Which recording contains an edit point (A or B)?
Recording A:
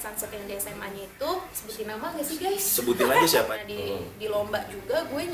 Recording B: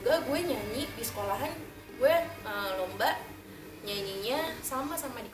A